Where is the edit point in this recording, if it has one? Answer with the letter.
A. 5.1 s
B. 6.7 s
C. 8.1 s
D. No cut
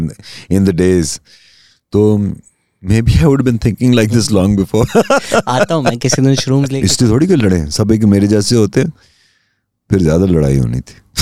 B